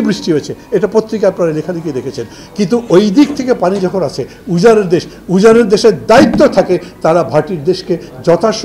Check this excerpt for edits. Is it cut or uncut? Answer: uncut